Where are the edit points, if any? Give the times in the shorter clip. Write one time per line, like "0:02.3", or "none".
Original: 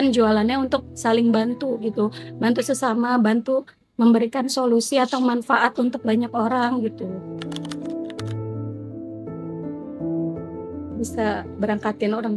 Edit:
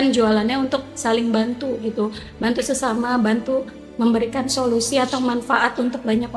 none